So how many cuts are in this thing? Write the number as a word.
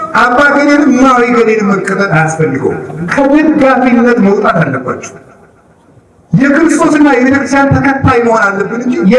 one